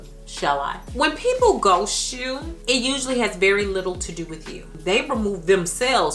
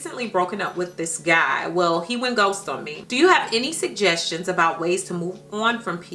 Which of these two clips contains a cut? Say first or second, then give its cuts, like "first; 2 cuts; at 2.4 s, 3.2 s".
first; 1 cut; at 4.7 s